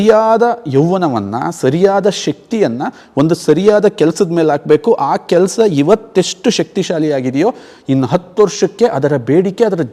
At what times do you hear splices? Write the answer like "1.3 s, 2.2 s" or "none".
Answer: none